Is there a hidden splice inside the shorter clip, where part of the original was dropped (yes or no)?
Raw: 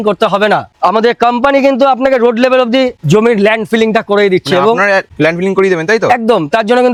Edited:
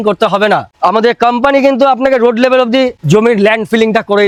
no